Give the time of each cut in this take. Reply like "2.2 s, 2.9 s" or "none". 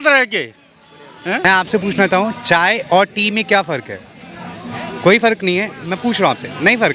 1.4 s